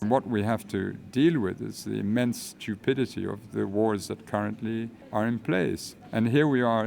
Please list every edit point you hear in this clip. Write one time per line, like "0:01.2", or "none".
0:05.0
0:05.9